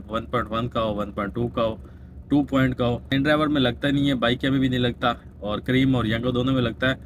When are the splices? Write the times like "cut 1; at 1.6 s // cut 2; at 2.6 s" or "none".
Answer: cut 1; at 3.1 s